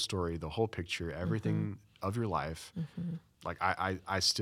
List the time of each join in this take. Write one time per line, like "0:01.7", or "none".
none

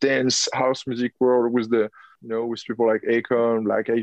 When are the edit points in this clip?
0:02.1

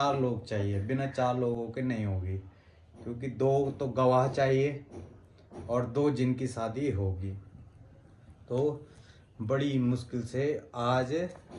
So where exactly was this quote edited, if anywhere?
none

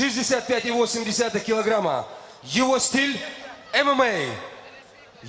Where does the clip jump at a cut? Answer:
none

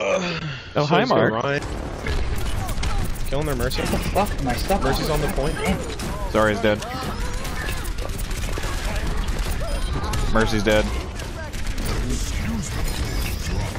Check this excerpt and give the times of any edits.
0:01.6

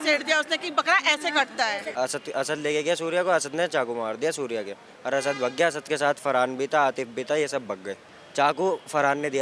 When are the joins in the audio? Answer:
0:01.9
0:08.2

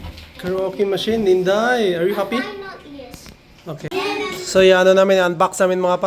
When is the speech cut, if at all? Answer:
0:03.9

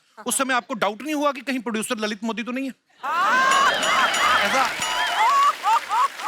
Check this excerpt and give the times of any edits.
none

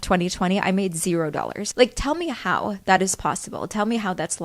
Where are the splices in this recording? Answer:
0:01.6

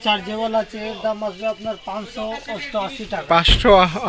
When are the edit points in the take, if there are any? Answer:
none

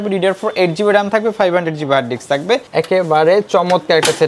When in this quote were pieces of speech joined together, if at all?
0:02.7

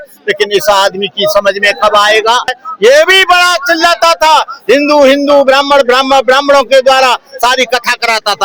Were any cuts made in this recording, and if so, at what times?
0:02.6

